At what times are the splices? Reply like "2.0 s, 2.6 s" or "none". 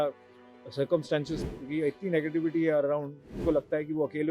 1.4 s, 3.4 s